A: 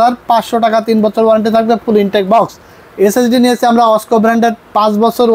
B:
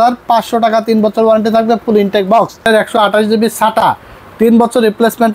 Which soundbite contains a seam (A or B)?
B